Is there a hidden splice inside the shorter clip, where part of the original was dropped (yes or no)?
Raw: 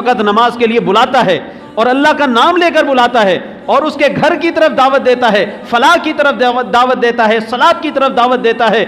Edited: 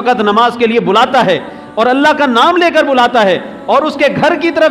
no